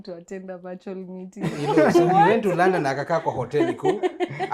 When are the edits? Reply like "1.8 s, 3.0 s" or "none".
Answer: none